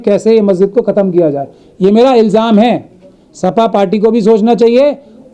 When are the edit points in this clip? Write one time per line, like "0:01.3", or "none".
none